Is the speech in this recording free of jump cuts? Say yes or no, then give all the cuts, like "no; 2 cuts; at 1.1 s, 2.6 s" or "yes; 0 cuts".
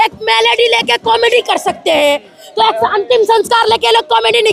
yes; 0 cuts